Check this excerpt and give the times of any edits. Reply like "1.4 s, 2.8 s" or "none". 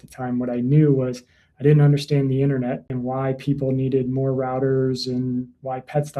2.9 s